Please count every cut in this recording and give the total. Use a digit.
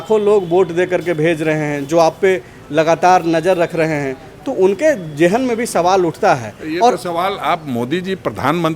0